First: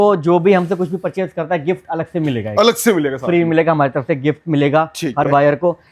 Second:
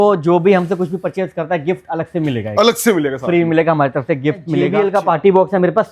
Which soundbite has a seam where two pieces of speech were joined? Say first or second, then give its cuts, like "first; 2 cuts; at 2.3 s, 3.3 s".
second; 1 cut; at 4.6 s